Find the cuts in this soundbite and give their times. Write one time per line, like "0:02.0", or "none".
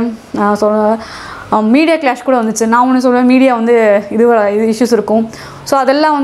none